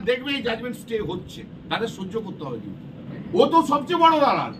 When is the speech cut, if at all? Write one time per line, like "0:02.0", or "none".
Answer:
0:03.1